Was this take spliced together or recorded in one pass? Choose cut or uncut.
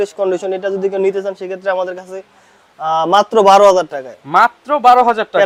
uncut